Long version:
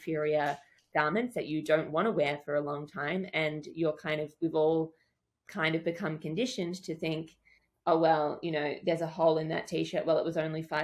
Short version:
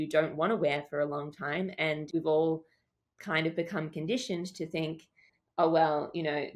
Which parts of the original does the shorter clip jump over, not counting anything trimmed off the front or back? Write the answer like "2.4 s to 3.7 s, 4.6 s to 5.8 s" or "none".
3.6 s to 4.3 s